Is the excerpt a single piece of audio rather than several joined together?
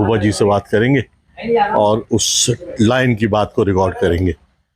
yes; 0 cuts

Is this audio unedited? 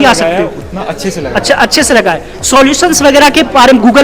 yes; 0 cuts

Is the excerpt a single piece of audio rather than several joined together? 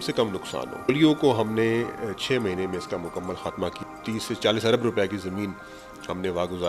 no; 2 cuts; at 0.9 s, 3.8 s

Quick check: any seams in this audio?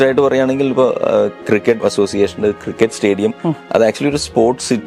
yes; 1 cut; at 1.7 s

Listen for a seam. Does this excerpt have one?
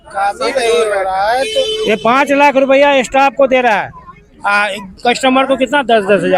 no; 0 cuts

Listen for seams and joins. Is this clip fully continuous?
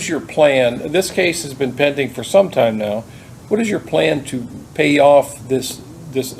yes; 0 cuts

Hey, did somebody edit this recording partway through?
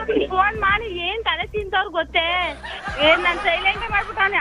no; 0 cuts

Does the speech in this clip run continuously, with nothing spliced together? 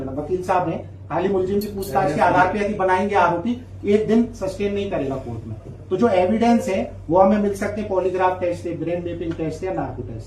yes; 0 cuts

